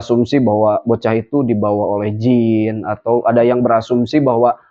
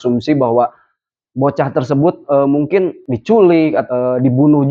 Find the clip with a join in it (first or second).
second